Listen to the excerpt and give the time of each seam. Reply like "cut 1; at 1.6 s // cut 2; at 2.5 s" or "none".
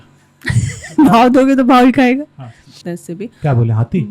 cut 1; at 2.8 s